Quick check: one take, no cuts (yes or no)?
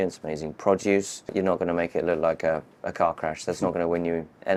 yes